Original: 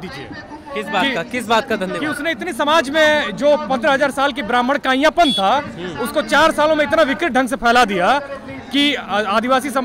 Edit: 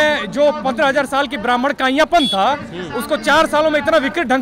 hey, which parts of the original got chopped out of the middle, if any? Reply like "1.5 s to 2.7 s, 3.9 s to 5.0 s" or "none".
none